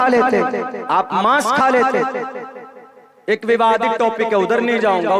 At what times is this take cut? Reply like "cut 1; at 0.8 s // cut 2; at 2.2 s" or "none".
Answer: none